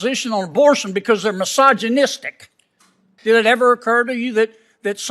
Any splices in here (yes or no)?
yes